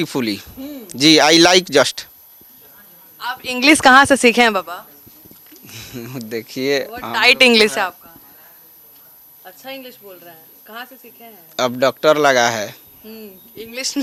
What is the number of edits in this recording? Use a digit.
0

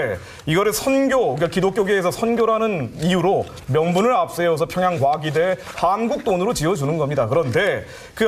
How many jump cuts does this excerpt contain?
0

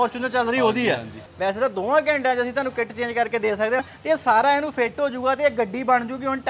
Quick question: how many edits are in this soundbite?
2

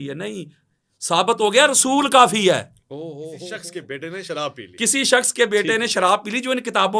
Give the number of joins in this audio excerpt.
1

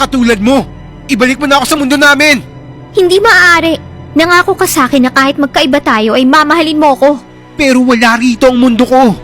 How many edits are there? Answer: 1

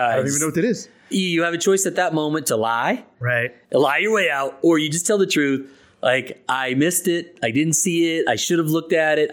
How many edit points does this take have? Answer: 1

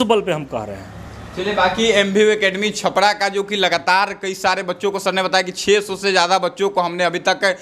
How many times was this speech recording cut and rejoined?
0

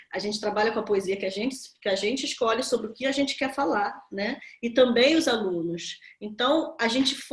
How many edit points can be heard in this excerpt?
0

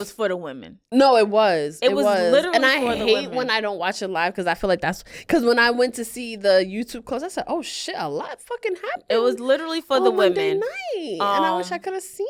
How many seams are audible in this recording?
0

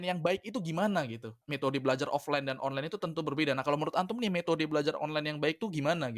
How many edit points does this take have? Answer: 1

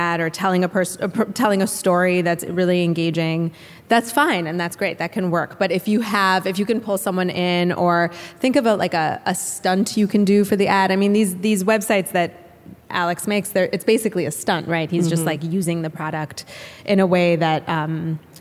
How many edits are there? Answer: 0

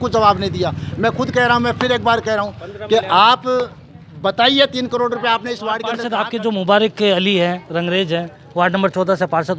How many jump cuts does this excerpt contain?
1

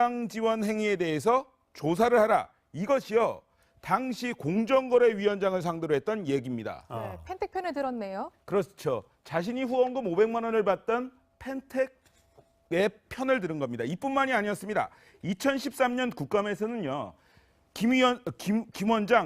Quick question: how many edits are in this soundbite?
1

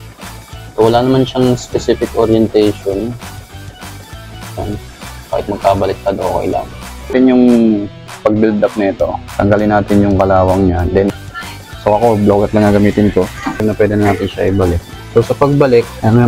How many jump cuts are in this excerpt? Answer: 3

